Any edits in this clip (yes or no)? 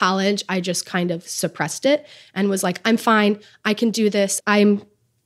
yes